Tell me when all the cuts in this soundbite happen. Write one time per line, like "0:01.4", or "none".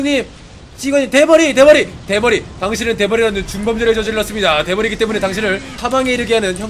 0:05.7